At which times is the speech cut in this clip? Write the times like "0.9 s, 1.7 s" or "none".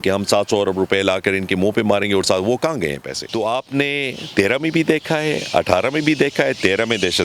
3.1 s